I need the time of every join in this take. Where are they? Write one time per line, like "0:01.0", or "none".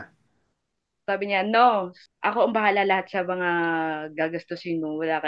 0:02.0